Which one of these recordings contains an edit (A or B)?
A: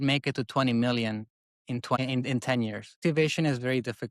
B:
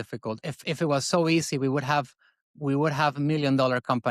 A